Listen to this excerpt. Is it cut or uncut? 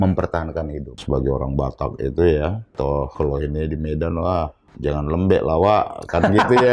cut